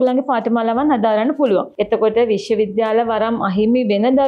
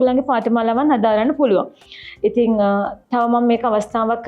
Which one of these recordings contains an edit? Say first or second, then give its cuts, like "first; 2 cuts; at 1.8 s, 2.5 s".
first; 1 cut; at 1.7 s